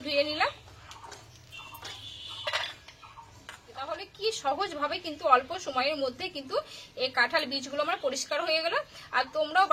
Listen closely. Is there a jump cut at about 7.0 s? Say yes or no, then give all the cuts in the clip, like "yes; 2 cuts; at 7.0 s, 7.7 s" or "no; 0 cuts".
no; 1 cut; at 3.9 s